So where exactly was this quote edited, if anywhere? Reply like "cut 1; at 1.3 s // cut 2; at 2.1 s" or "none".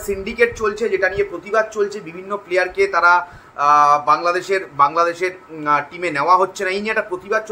none